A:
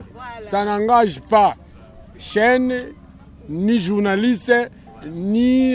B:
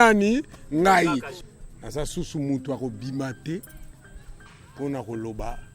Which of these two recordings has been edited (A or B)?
B